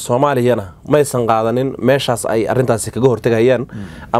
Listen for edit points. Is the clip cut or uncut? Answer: uncut